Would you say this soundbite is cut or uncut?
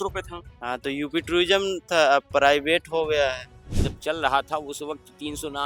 cut